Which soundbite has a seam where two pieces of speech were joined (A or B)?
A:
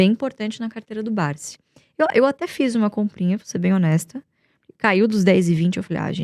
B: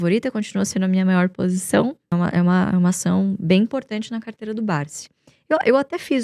B